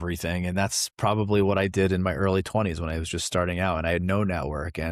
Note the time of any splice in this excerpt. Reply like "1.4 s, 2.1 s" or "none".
none